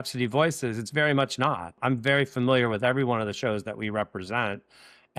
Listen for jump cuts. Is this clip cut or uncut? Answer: cut